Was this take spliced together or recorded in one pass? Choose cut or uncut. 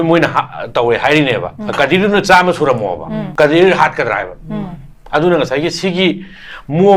cut